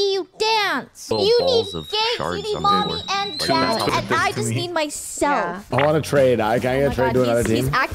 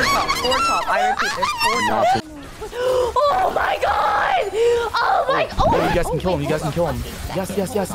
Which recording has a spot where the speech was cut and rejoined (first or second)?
second